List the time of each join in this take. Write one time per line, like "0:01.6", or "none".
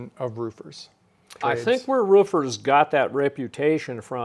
0:01.4